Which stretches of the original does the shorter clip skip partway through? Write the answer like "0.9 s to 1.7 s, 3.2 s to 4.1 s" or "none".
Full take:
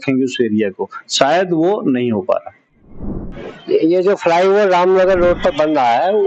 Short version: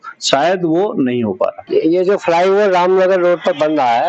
2.5 s to 3.6 s